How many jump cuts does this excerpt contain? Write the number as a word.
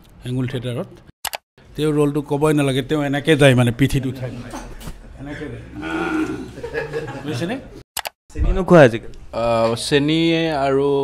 two